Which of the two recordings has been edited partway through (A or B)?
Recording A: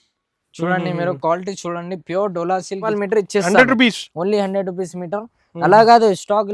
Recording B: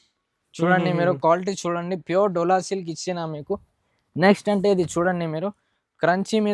A